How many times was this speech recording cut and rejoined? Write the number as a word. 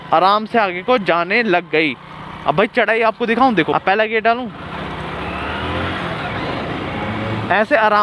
one